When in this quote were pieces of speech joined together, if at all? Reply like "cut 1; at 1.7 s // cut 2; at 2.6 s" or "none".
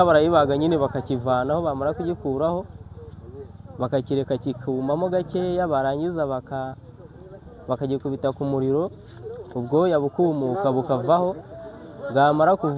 none